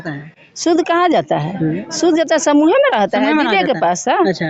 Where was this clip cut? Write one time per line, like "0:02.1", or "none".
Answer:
none